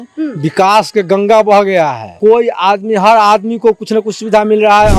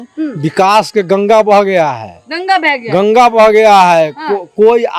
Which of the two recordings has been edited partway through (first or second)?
first